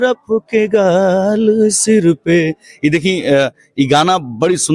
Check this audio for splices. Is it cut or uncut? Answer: uncut